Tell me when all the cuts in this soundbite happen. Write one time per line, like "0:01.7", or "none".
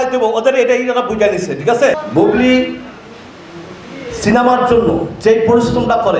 0:01.9